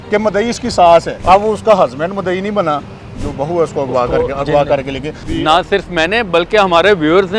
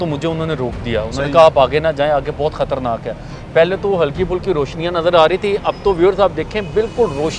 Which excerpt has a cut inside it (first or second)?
first